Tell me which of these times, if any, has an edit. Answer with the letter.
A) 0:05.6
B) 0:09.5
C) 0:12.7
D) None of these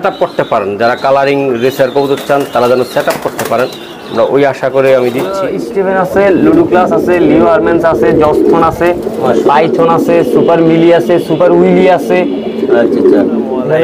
A